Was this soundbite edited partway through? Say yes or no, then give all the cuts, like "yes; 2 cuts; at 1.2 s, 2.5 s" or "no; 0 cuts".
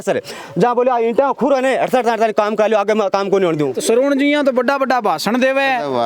yes; 1 cut; at 3.8 s